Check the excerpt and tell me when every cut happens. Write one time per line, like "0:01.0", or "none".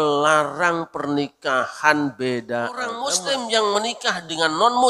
0:02.9